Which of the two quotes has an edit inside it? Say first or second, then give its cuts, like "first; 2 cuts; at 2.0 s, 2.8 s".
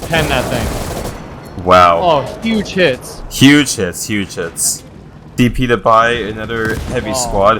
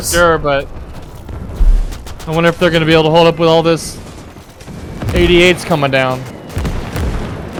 first; 1 cut; at 5.3 s